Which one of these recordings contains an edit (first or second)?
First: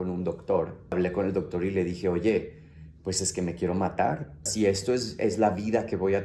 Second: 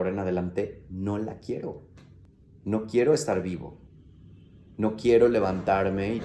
first